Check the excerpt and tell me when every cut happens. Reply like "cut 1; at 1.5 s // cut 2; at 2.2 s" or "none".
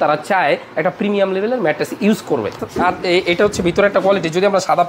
cut 1; at 2.5 s

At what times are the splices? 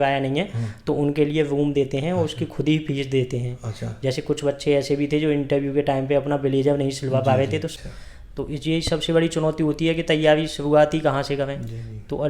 cut 1; at 7.7 s

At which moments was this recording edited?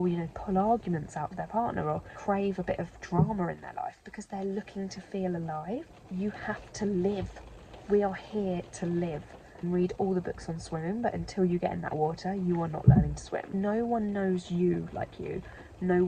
cut 1; at 2.2 s // cut 2; at 6.0 s // cut 3; at 9.6 s // cut 4; at 13.5 s

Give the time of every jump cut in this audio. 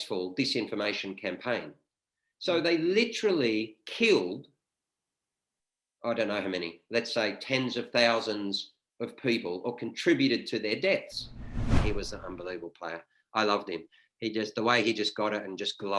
cut 1; at 11.8 s

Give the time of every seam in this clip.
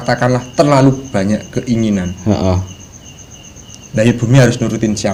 none

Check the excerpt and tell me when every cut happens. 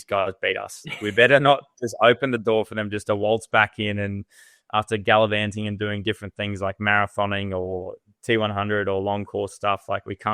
none

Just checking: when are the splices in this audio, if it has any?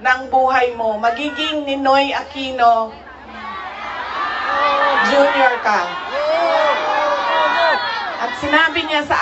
none

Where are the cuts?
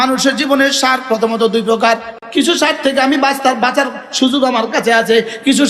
cut 1; at 2.1 s

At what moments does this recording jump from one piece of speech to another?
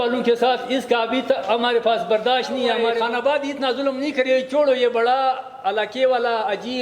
cut 1; at 2.8 s

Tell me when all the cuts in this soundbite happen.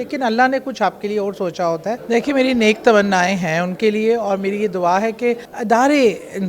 cut 1; at 2.0 s // cut 2; at 5.5 s

